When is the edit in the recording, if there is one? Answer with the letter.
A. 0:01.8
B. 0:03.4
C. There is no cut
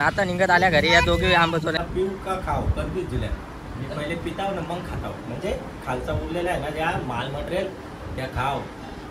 A